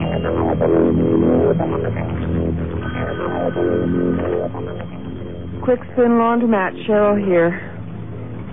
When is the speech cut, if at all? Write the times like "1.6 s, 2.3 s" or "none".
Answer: 2.7 s